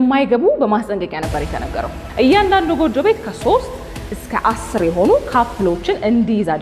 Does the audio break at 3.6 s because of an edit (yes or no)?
no